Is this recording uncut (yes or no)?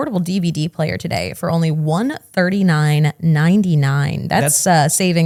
yes